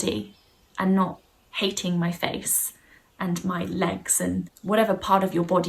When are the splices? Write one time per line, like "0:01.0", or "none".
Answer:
0:04.5